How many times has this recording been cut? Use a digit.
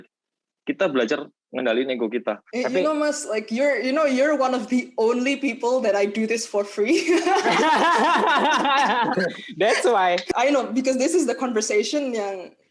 2